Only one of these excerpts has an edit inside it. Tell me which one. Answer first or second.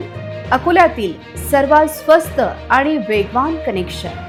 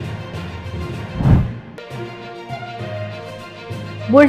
second